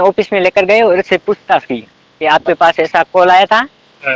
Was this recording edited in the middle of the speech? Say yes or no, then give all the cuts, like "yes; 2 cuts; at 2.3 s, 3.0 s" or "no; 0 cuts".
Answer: no; 0 cuts